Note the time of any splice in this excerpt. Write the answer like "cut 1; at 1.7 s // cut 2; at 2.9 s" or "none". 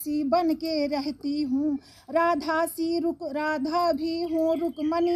none